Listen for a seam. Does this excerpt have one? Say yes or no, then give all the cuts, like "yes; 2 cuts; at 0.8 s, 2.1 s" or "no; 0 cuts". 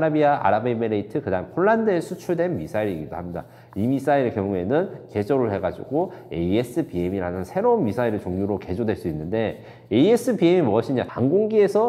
no; 0 cuts